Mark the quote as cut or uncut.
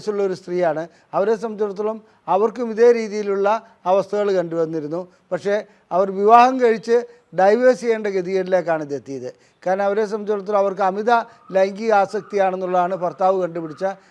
uncut